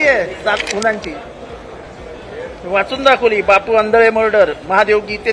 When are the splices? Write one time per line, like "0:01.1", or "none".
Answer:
none